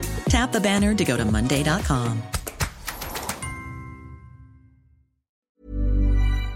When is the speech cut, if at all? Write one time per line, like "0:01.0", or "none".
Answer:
0:05.5